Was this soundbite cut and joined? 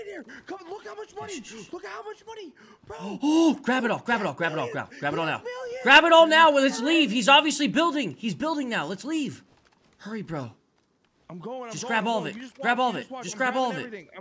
no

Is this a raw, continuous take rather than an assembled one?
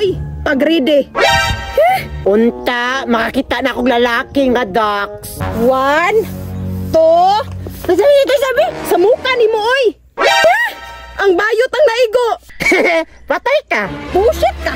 no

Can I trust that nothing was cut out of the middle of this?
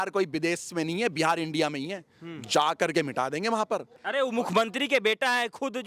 no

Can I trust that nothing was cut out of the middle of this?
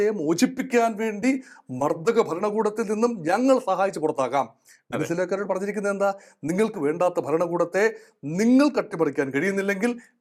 yes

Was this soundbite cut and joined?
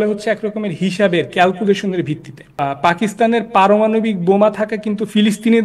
yes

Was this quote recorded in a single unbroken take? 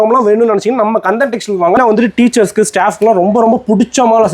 no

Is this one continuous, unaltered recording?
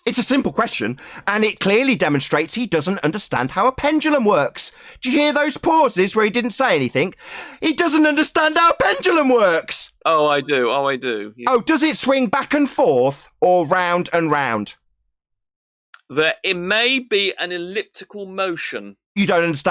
yes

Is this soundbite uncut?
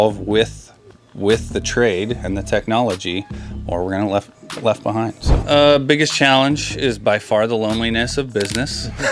no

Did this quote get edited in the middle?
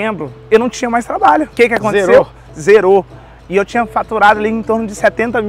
no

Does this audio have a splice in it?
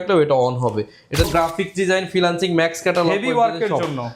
yes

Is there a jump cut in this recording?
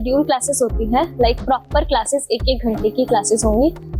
no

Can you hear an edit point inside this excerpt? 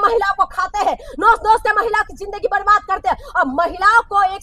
no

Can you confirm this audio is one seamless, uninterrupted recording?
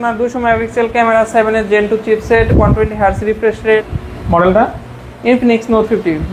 no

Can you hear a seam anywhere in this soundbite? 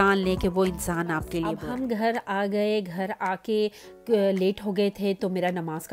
yes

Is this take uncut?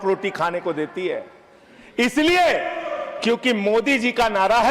yes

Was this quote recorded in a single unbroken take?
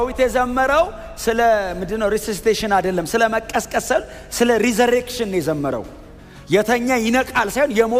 yes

